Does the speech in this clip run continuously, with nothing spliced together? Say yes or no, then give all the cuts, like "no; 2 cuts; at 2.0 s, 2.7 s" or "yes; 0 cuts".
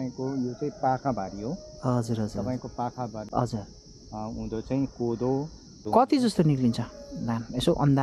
no; 1 cut; at 3.3 s